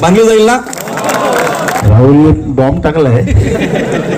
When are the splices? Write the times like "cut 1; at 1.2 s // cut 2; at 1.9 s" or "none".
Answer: cut 1; at 1.8 s